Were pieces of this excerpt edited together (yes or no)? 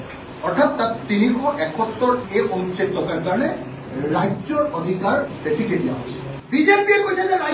yes